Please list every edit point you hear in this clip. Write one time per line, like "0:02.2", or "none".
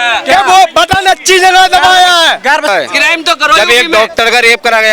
0:02.7